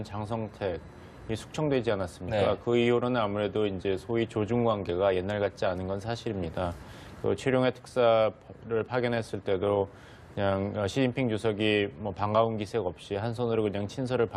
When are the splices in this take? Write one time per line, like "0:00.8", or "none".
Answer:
none